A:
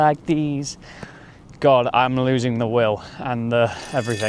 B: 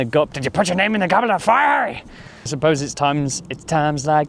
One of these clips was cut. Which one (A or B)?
B